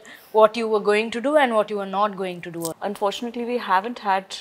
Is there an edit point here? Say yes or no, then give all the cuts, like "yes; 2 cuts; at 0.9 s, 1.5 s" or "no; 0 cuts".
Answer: yes; 1 cut; at 2.7 s